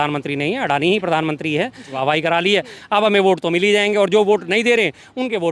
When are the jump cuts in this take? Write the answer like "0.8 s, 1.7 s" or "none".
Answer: 1.9 s